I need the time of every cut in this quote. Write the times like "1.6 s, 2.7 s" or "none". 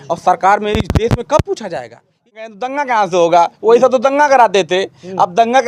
2.4 s